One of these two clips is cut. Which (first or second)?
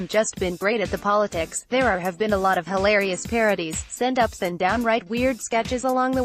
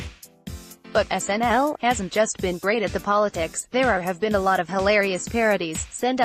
second